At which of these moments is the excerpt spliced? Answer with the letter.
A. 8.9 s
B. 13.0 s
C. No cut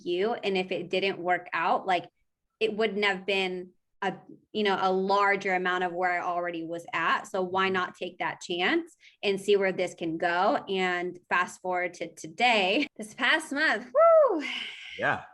B